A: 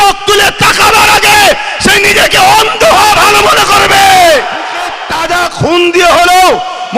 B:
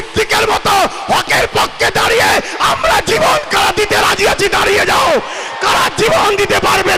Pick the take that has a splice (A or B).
A